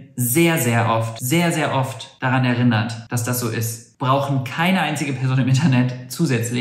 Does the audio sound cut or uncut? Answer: cut